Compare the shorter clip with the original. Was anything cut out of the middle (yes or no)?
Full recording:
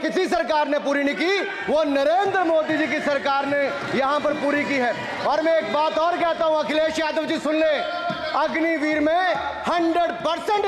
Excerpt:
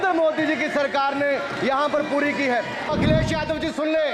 yes